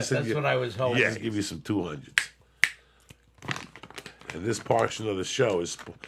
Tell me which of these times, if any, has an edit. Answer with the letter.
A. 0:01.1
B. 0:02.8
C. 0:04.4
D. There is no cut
A